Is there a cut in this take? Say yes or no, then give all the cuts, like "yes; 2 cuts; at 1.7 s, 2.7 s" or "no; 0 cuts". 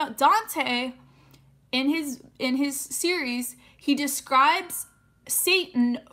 no; 0 cuts